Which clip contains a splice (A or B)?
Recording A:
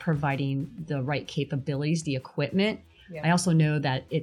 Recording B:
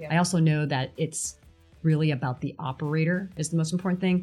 B